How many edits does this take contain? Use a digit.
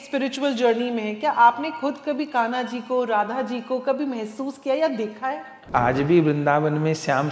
1